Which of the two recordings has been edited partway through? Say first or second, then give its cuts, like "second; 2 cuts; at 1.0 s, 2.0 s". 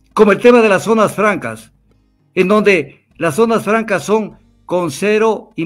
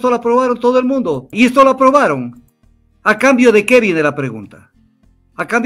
second; 1 cut; at 1.3 s